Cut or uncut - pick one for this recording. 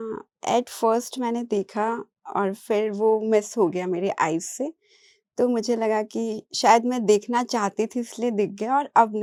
uncut